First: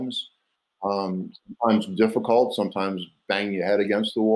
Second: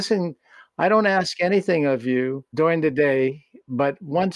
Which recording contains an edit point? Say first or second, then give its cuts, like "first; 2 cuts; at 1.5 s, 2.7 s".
second; 1 cut; at 2.4 s